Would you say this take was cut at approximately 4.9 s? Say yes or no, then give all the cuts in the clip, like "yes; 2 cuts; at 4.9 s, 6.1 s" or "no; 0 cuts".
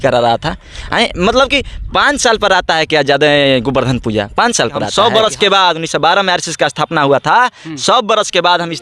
yes; 1 cut; at 4.9 s